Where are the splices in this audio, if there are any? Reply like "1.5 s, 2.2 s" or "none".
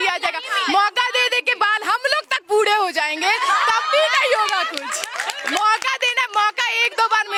none